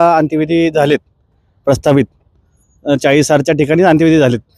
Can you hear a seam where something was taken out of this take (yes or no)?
no